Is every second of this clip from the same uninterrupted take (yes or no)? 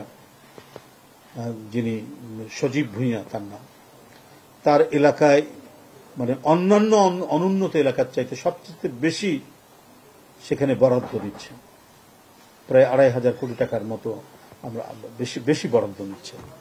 yes